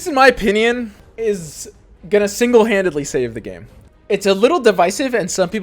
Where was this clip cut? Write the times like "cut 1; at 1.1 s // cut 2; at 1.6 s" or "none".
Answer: cut 1; at 1.0 s